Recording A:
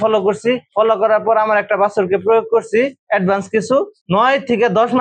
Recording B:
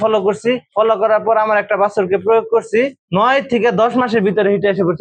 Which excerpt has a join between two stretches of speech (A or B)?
B